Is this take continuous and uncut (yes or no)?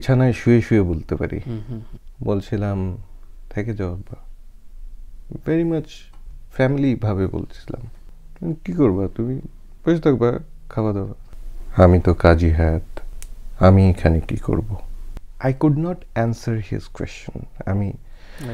yes